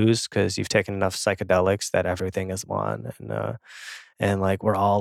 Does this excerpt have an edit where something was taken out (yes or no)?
no